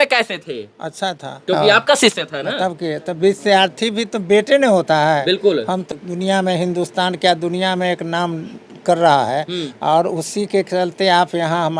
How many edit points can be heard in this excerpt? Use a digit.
2